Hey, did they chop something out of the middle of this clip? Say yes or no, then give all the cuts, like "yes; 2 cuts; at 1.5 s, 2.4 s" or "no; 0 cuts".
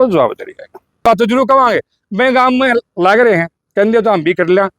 yes; 1 cut; at 1.0 s